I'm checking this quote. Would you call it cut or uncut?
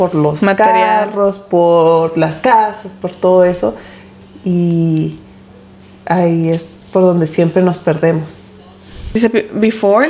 cut